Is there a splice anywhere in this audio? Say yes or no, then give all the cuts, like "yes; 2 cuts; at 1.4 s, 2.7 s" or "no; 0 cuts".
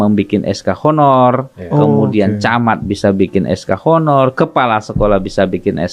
no; 0 cuts